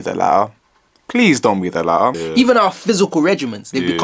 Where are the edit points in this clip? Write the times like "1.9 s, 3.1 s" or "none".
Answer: 2.2 s